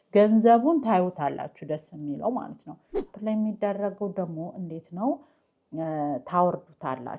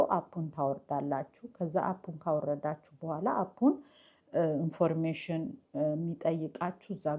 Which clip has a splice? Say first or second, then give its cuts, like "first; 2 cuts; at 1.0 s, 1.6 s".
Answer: first; 1 cut; at 3.1 s